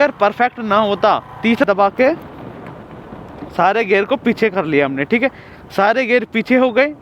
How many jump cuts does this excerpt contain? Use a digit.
1